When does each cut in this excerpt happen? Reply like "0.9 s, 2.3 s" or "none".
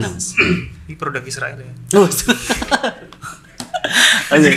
none